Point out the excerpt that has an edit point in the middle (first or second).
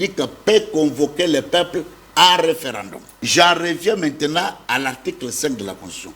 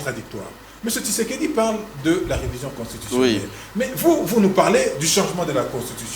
first